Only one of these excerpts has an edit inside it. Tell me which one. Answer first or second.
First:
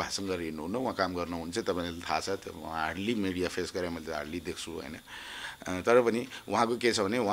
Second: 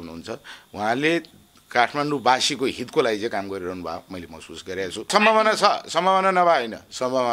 second